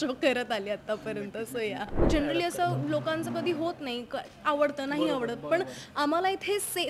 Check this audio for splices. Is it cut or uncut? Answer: cut